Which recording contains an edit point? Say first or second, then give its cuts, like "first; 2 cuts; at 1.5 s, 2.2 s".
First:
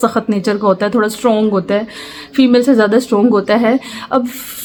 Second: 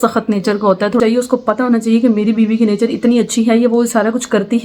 second; 1 cut; at 1.0 s